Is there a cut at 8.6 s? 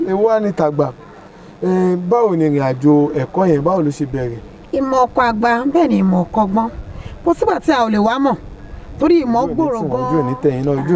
no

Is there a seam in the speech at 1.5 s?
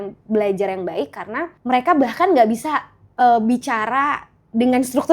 yes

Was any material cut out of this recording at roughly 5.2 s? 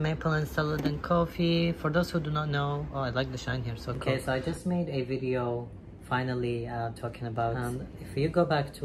no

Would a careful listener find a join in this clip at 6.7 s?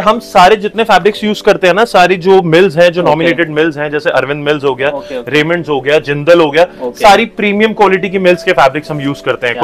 no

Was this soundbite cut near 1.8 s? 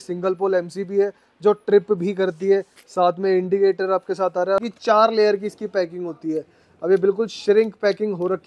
no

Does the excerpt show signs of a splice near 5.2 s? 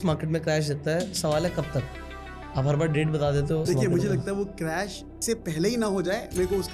yes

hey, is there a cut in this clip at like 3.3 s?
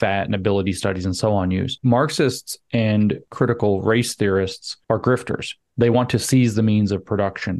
yes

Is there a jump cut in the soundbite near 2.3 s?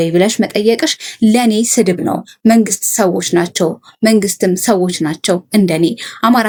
no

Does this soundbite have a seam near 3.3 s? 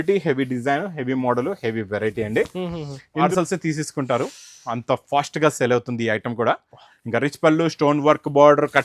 yes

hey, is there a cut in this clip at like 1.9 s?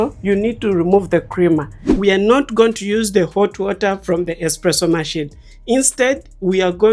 yes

